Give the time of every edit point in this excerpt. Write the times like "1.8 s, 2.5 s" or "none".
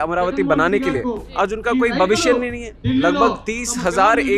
2.7 s